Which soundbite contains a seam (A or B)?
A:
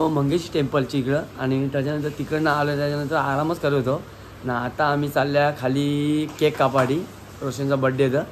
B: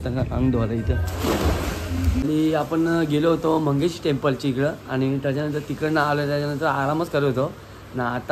B